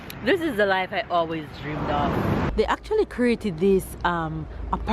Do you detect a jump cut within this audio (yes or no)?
yes